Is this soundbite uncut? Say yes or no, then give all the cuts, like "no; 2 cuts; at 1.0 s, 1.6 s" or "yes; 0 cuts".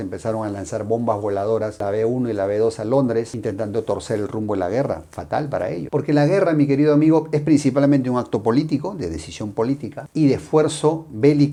yes; 0 cuts